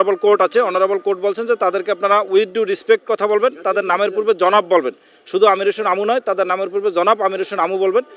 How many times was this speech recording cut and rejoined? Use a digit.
0